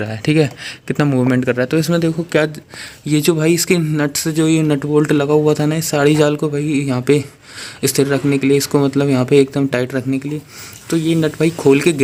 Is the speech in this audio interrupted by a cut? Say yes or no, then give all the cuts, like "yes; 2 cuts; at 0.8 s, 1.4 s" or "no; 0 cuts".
no; 0 cuts